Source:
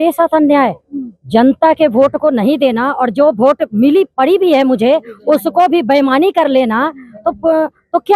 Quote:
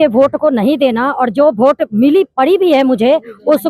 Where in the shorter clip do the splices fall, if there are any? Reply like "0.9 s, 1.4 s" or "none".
none